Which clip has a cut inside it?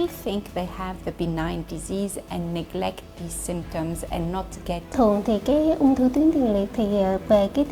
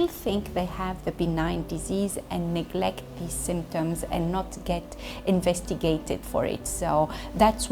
first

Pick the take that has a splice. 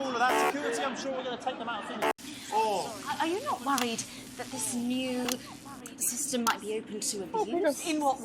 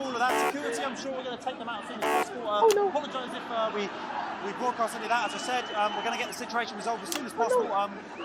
first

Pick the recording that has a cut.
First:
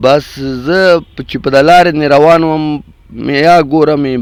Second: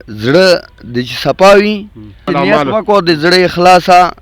second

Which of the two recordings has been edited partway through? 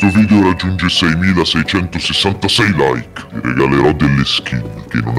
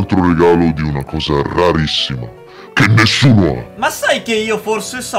second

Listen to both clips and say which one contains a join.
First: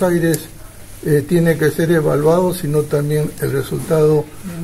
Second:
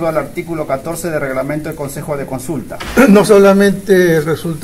second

